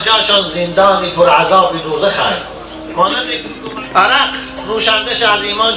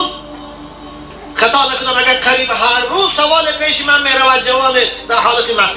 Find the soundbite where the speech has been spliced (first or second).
first